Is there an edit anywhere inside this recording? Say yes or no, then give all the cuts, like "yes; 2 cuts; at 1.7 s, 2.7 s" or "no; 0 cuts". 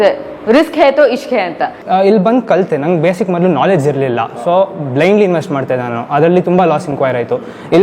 yes; 1 cut; at 1.7 s